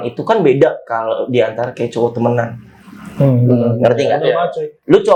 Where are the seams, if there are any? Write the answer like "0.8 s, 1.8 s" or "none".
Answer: none